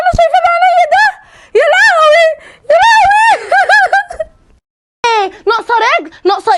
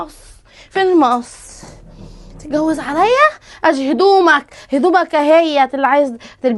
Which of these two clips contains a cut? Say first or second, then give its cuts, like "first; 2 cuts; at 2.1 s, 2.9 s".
first; 1 cut; at 5.0 s